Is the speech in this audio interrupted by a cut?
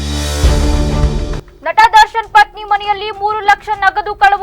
yes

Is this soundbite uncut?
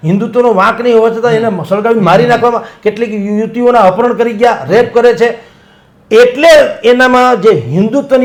yes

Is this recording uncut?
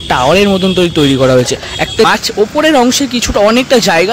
no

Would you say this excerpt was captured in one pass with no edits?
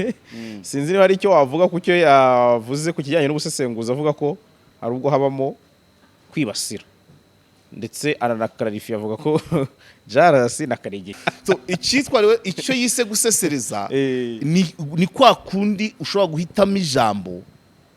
no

